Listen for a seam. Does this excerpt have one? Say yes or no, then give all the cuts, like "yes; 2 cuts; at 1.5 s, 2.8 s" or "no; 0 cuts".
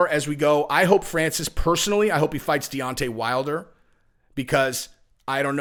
no; 0 cuts